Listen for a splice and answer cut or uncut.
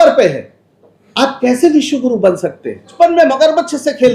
cut